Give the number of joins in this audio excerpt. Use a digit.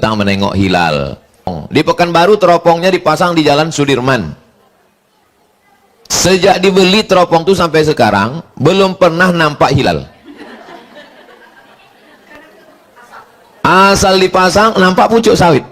1